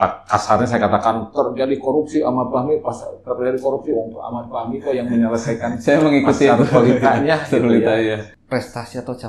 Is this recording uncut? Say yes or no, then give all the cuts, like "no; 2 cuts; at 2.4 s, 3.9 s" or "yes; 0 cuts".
no; 1 cut; at 8.3 s